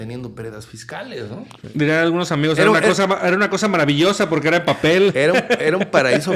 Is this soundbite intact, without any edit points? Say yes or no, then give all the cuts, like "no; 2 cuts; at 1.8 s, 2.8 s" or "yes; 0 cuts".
no; 1 cut; at 1.5 s